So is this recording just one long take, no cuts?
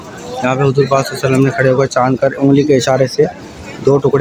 yes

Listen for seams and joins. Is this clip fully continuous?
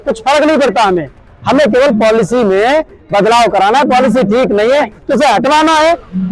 yes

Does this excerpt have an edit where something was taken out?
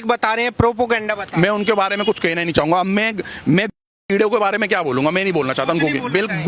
no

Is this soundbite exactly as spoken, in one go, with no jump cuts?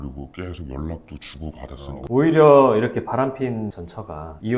no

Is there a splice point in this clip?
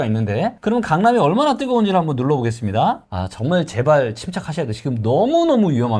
yes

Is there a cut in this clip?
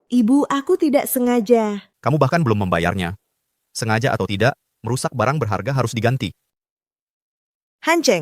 yes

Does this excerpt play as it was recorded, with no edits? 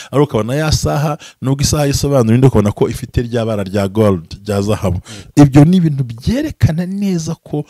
yes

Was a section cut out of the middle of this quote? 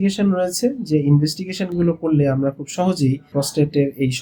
yes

